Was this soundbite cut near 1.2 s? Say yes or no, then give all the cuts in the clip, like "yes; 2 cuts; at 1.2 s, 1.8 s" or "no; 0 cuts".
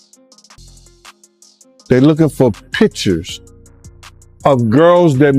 yes; 1 cut; at 1.2 s